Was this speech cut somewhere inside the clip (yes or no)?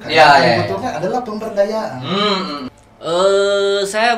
yes